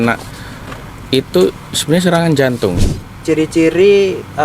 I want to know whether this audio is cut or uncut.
cut